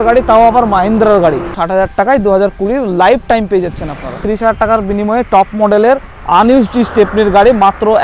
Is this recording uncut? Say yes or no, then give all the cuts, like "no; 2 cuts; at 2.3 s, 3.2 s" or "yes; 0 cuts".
no; 2 cuts; at 1.6 s, 4.1 s